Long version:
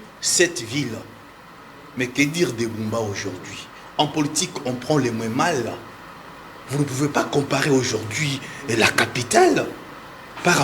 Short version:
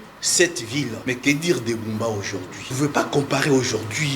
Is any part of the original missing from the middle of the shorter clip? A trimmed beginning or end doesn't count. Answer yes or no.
yes